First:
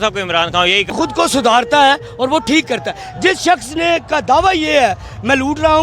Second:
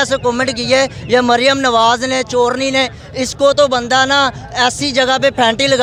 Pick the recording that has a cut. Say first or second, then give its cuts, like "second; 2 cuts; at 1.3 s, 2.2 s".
first; 1 cut; at 0.9 s